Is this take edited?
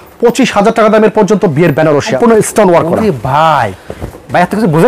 yes; 1 cut; at 2.2 s

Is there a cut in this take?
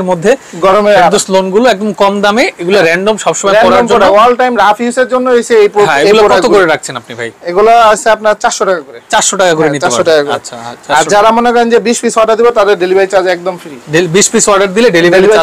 no; 0 cuts

